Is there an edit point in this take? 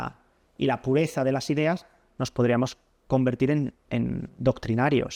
no; 0 cuts

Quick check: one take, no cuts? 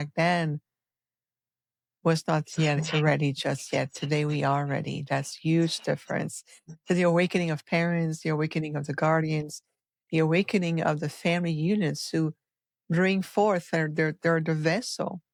yes; 0 cuts

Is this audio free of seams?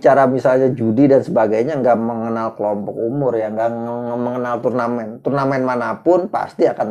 yes; 0 cuts

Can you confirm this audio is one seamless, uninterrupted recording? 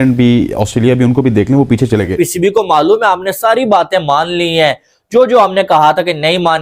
no; 1 cut; at 2.1 s

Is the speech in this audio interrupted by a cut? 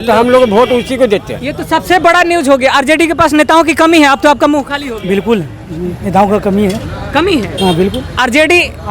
no; 0 cuts

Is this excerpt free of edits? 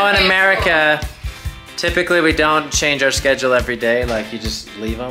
yes; 0 cuts

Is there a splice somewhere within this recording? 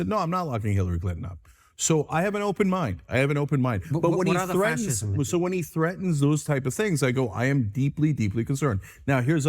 yes; 1 cut; at 3.4 s

